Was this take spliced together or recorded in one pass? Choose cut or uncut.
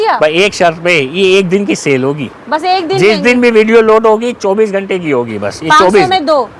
uncut